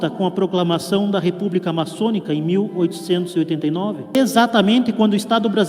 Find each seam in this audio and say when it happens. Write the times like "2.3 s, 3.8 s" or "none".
4.2 s